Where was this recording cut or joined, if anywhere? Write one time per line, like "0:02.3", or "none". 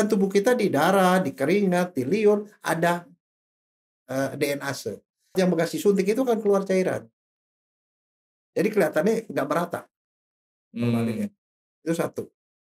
0:05.3